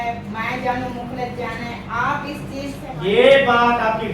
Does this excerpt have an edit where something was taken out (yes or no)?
yes